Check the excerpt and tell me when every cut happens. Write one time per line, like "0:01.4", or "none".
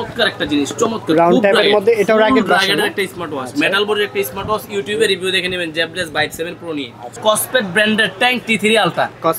0:07.1